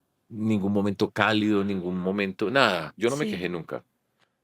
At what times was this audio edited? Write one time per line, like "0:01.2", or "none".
0:02.9

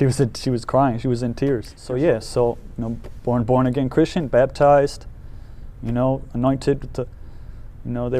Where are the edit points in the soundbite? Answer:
0:01.8

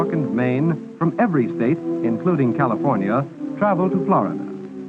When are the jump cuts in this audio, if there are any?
0:03.1

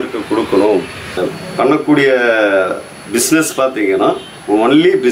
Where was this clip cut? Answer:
0:01.2

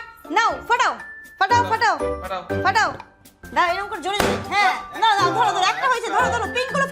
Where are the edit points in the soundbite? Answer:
0:03.4

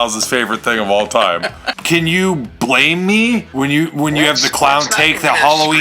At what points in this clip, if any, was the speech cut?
0:01.8
0:03.5

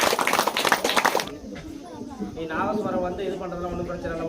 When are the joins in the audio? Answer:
0:01.2

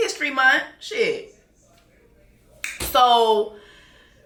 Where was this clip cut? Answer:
none

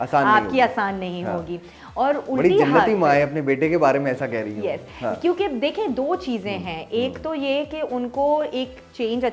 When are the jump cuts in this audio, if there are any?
none

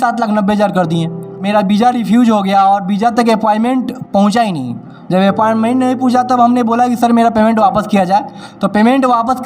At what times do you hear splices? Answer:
0:01.4

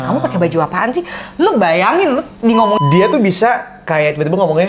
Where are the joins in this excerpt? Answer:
0:02.8

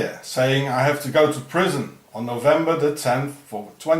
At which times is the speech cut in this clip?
0:01.6

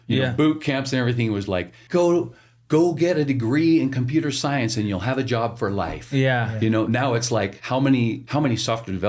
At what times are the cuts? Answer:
0:01.8
0:07.6
0:08.2

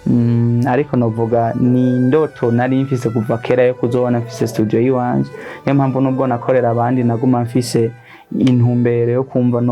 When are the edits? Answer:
none

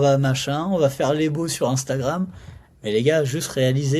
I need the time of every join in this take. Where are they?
none

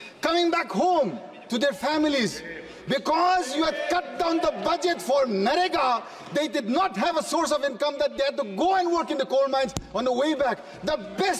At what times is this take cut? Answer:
none

